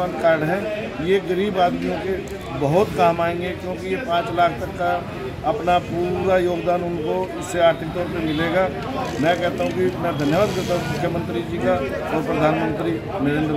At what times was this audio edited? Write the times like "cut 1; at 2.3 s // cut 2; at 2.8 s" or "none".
none